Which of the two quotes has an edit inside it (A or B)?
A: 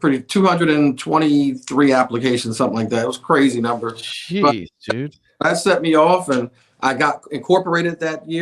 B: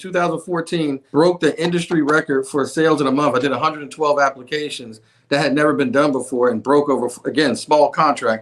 B